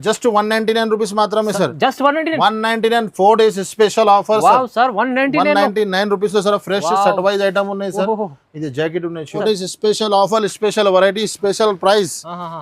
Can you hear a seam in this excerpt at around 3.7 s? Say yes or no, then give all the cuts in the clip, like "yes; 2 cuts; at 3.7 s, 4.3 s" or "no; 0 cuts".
no; 1 cut; at 9.4 s